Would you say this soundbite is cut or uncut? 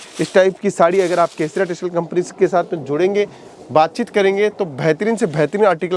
uncut